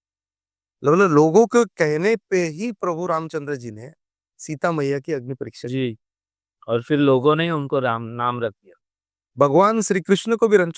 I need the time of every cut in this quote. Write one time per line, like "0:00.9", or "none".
none